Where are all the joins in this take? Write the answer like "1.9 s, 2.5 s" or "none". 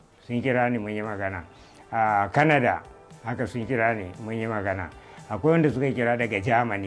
none